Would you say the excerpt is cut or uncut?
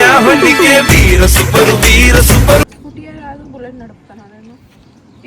cut